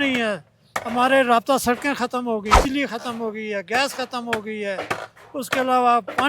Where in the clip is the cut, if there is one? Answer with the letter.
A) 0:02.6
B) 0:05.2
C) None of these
A